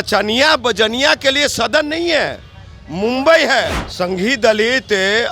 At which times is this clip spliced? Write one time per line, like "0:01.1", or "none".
0:03.8